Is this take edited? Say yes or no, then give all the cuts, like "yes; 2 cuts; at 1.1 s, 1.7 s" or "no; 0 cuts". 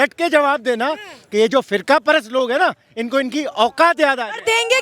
no; 0 cuts